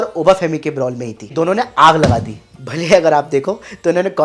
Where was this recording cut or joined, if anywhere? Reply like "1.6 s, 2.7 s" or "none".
1.2 s